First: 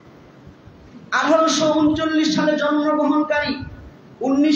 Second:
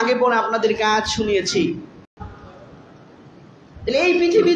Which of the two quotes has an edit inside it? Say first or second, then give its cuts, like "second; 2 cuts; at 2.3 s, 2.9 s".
second; 1 cut; at 2.2 s